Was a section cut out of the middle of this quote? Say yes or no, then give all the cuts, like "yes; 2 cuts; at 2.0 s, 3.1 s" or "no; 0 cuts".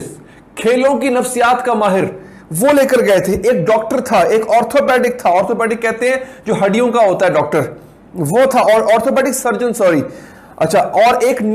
no; 0 cuts